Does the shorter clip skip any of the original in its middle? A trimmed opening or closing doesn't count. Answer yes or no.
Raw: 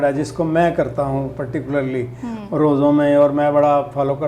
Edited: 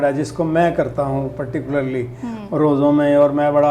no